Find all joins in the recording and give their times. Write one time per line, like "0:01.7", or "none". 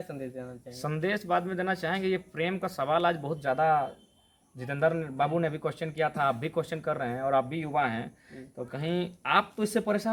none